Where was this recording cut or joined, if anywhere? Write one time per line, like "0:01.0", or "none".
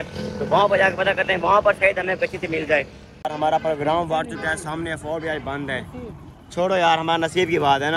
none